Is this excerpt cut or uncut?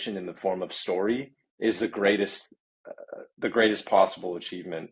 uncut